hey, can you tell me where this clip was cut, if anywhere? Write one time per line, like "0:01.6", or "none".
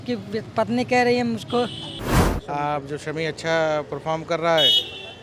0:02.2